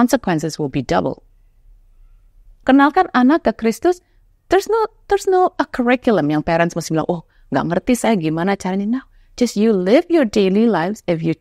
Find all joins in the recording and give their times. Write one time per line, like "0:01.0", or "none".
0:02.6